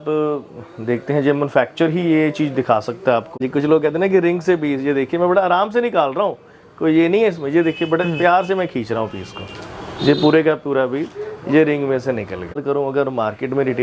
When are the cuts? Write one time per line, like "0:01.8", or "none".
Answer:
0:03.4
0:12.6